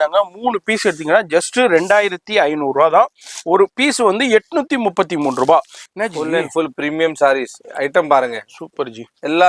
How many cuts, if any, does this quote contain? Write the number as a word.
one